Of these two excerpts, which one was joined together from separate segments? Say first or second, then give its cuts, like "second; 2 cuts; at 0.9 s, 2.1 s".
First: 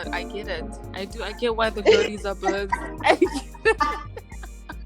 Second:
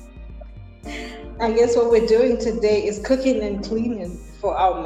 first; 1 cut; at 4.0 s